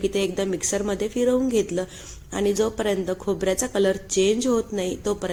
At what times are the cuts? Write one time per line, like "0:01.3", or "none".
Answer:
none